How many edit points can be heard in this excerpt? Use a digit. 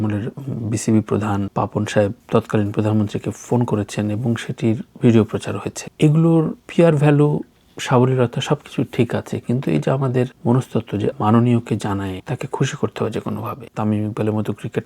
1